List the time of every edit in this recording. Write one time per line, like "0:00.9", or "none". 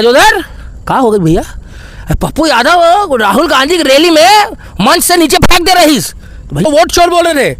0:06.6

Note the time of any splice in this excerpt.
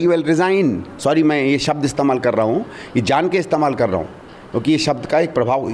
none

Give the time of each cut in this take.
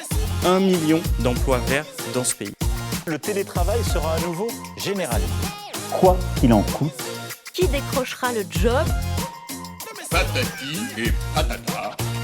none

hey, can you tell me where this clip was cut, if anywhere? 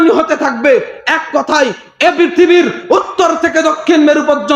none

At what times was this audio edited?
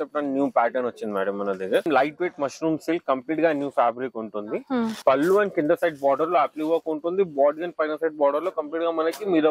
0:01.9
0:05.0

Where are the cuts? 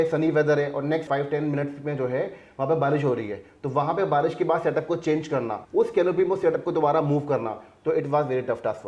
0:01.1
0:05.6

